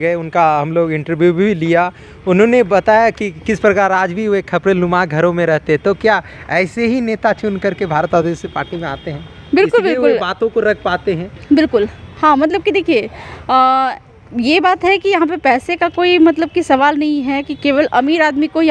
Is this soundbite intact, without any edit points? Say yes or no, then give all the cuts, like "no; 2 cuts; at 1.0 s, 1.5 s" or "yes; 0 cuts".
yes; 0 cuts